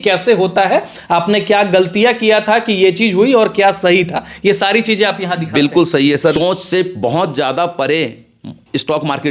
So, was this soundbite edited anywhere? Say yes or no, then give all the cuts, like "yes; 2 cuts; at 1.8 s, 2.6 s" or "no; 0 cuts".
yes; 1 cut; at 6.3 s